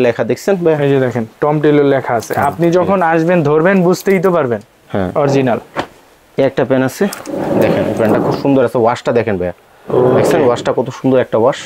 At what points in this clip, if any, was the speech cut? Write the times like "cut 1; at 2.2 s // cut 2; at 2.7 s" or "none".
none